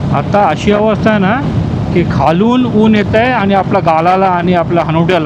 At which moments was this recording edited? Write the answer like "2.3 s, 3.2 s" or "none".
none